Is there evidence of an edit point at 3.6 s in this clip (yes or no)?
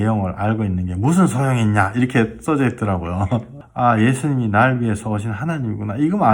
yes